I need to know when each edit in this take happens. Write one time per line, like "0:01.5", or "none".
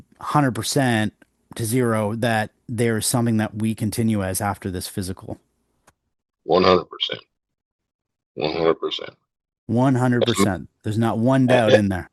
none